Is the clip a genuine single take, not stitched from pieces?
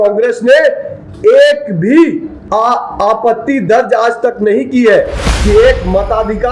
no; 2 cuts; at 2.3 s, 5.2 s

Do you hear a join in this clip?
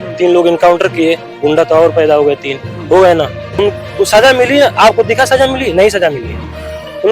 yes; 1 cut; at 3.5 s

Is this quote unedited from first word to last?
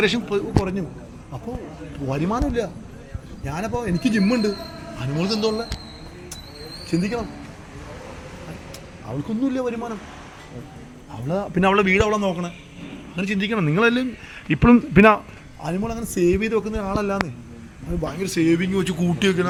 yes; 0 cuts

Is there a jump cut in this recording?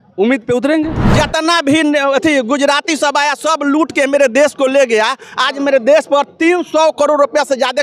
yes; 1 cut; at 1.0 s

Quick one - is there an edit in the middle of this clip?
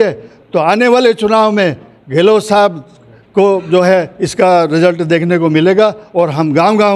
no; 0 cuts

